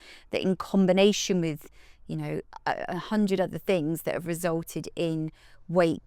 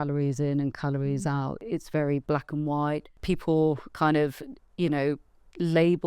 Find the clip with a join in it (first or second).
second